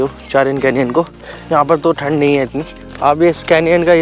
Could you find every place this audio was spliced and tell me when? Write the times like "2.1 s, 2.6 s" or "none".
2.7 s